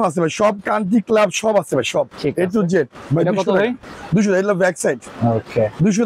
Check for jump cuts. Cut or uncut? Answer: uncut